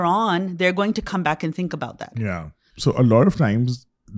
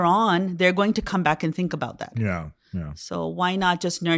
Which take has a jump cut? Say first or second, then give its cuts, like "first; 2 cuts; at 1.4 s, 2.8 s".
first; 1 cut; at 2.7 s